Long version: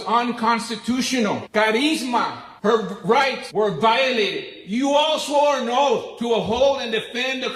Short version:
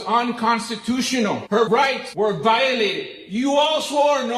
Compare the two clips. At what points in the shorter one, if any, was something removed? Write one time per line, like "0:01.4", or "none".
0:01.6